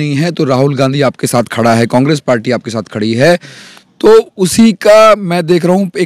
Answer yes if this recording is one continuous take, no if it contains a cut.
yes